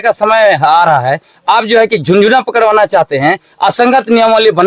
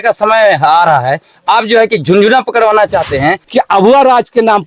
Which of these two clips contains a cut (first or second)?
second